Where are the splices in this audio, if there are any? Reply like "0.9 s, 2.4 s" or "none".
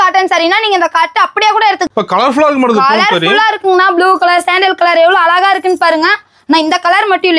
1.8 s